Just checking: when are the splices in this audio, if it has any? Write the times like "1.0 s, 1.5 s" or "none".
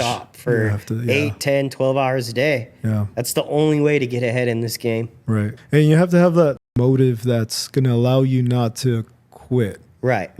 5.6 s, 6.7 s